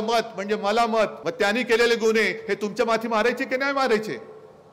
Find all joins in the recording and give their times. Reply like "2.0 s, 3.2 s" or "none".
1.2 s